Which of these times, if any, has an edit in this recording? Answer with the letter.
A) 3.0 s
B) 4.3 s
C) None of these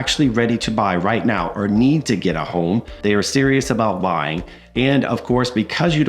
A